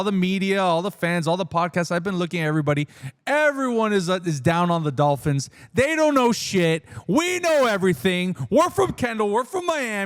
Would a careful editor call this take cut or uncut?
uncut